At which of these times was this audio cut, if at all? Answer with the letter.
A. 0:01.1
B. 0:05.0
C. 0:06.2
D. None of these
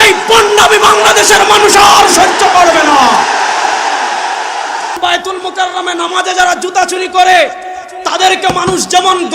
B